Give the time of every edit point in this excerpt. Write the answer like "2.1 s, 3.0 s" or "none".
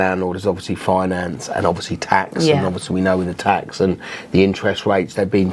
none